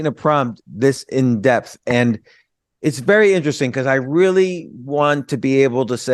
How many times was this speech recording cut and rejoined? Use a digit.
0